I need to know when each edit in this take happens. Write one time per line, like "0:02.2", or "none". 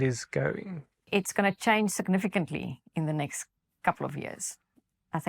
0:00.9